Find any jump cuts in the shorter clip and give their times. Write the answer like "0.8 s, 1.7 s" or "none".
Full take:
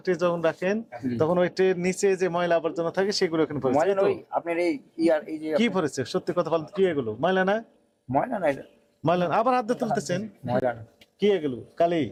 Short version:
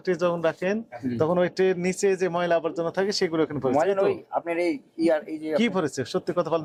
none